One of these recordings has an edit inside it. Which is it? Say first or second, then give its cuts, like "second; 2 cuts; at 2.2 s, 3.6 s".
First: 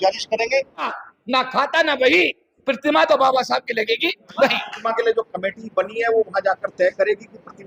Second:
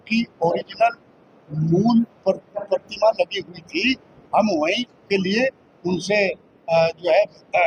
first; 2 cuts; at 0.9 s, 4.8 s